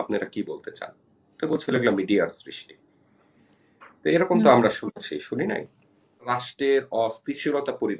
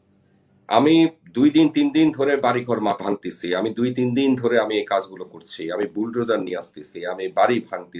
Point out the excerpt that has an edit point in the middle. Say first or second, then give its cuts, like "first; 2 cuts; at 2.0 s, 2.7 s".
first; 1 cut; at 6.4 s